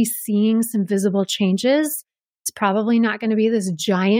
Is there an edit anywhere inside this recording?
no; 0 cuts

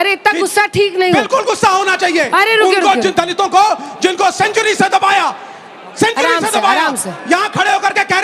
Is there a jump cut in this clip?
no; 0 cuts

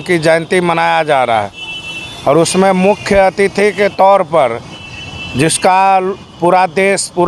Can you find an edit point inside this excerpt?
no; 0 cuts

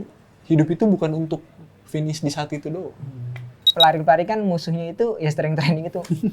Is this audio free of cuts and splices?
no; 1 cut; at 3.7 s

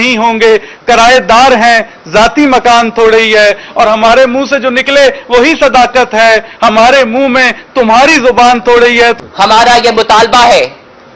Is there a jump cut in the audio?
yes; 1 cut; at 9.2 s

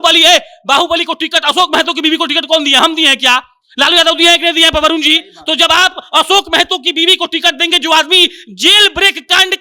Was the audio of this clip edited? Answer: no; 0 cuts

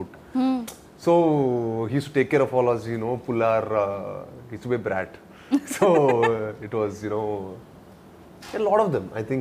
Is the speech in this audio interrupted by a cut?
no; 0 cuts

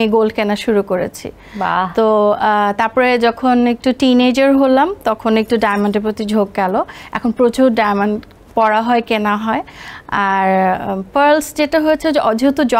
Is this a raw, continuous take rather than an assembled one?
yes; 0 cuts

